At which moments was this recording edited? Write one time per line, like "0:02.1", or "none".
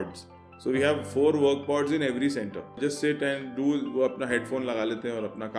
0:02.8